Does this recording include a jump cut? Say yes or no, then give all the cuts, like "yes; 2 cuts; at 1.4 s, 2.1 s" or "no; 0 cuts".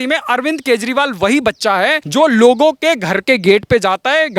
yes; 1 cut; at 2.0 s